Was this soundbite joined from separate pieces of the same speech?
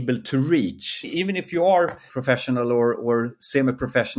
yes; 2 cuts; at 1.0 s, 2.1 s

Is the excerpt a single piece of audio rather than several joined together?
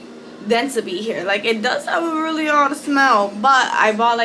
yes; 0 cuts

